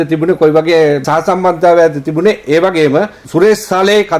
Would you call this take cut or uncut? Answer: cut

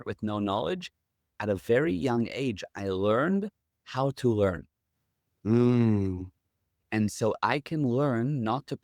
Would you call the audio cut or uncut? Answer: cut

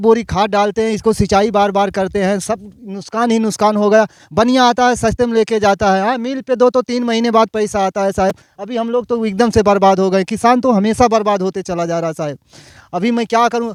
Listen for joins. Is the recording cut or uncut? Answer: uncut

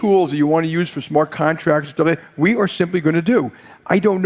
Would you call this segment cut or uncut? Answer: uncut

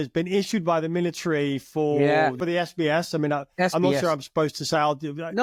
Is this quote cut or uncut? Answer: uncut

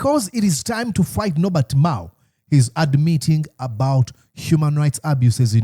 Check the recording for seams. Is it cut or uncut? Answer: uncut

